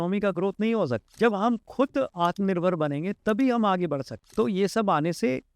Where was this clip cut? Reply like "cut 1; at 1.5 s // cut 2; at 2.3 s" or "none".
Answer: cut 1; at 1.0 s // cut 2; at 4.3 s